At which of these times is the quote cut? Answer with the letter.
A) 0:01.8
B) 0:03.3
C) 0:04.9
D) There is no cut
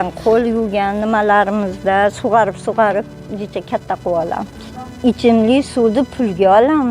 C